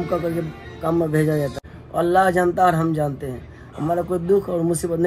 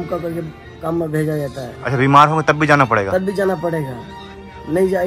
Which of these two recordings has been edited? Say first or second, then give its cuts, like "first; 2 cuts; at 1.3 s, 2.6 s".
first; 1 cut; at 1.7 s